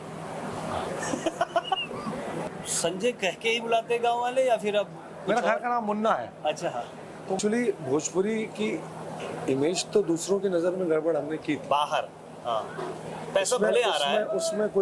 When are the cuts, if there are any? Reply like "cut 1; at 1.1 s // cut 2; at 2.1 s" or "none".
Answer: cut 1; at 2.5 s // cut 2; at 7.4 s